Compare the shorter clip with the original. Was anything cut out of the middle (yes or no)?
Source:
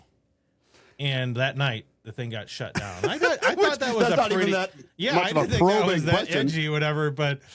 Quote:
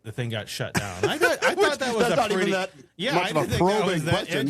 no